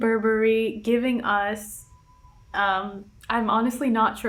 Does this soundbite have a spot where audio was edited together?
no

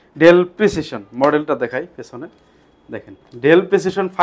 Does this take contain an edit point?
no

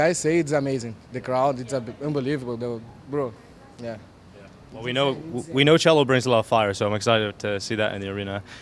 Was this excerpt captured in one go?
yes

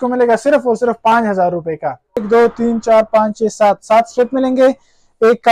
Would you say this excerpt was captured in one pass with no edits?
no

